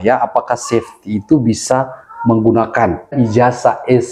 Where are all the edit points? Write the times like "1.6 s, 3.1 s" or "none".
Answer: 3.1 s